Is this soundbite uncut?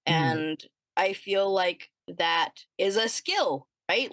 no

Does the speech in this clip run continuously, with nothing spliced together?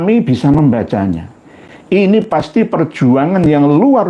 yes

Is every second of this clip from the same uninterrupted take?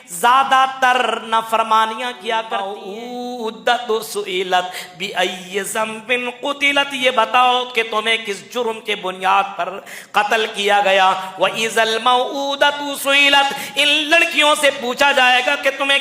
no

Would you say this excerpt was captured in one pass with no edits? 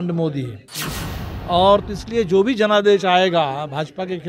yes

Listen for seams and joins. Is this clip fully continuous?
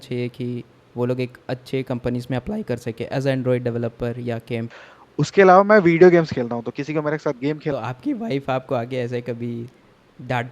no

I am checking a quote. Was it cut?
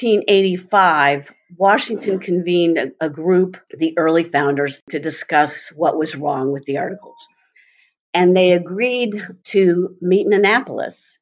yes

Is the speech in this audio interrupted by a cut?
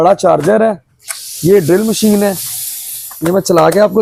no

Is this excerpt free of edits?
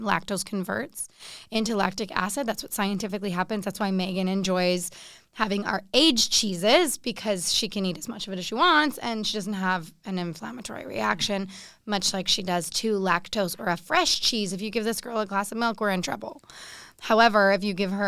yes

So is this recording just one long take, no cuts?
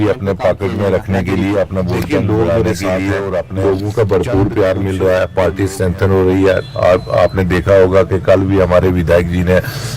no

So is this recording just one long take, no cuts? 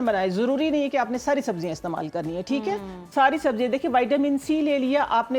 yes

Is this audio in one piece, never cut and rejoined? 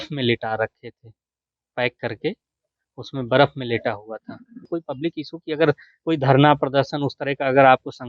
no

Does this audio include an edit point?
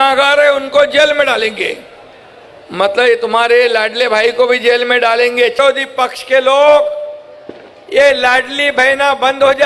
yes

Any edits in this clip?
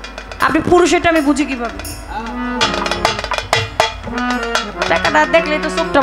yes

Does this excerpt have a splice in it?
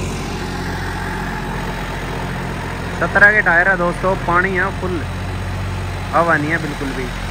no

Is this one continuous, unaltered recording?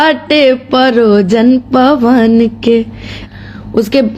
no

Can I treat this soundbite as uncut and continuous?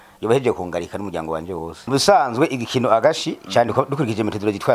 no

